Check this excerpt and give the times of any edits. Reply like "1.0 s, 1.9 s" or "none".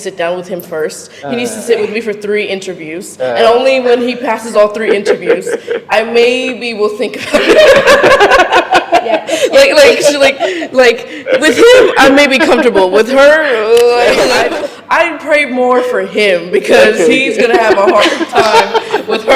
14.4 s